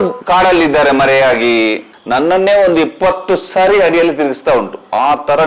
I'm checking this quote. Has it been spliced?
yes; 1 cut; at 1.9 s

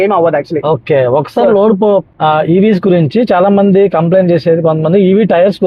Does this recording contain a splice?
yes; 1 cut; at 2.1 s

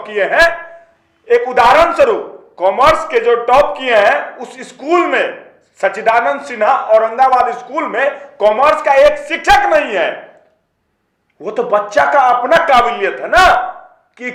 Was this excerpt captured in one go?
yes; 0 cuts

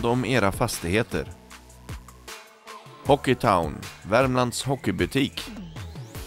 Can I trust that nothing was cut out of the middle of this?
no; 1 cut; at 5.4 s

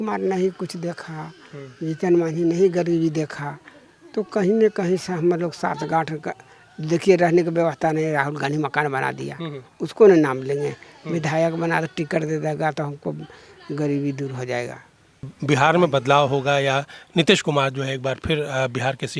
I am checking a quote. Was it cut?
yes; 1 cut; at 15.4 s

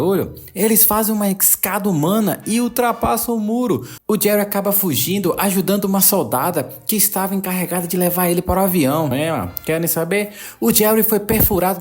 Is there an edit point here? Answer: yes; 1 cut; at 9.1 s

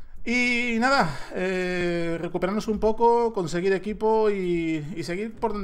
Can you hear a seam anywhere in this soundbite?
no; 0 cuts

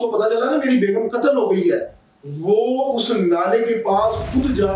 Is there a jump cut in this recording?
no; 0 cuts

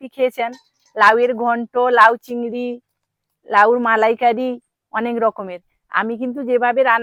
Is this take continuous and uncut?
yes; 0 cuts

